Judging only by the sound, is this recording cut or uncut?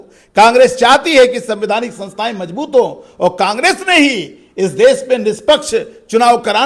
uncut